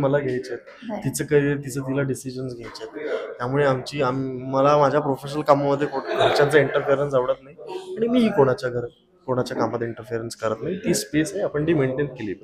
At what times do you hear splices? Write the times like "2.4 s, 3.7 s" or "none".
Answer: none